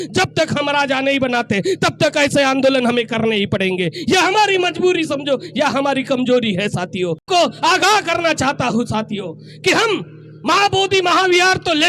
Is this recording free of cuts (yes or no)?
no